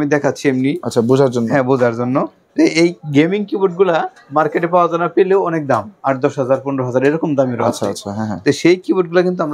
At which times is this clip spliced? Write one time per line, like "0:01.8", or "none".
none